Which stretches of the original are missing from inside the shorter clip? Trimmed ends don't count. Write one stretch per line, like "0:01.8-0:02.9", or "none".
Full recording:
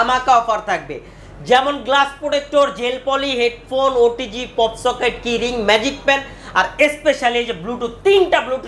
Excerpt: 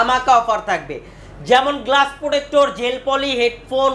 none